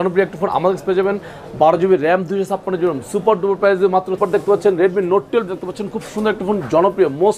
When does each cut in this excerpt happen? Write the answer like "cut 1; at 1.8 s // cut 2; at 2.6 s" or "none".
cut 1; at 4.2 s